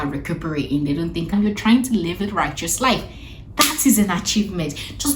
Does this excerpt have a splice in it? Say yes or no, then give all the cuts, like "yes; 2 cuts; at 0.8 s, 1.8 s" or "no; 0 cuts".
yes; 1 cut; at 1.3 s